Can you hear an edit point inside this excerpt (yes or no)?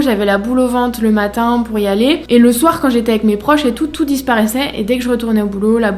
no